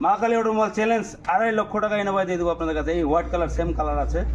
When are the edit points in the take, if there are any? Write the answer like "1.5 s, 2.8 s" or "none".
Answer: none